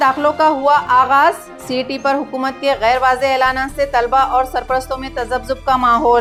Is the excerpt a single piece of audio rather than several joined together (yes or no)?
yes